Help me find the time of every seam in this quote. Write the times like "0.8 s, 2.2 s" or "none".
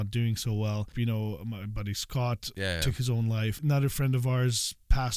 0.9 s, 2.5 s, 3.6 s